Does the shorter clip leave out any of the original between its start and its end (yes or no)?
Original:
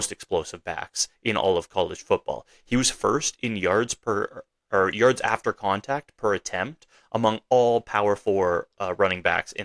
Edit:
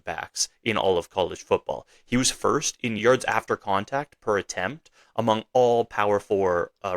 yes